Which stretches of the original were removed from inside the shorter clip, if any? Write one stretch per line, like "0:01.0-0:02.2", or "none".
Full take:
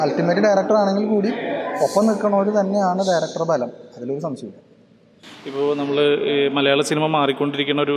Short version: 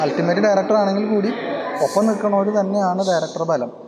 none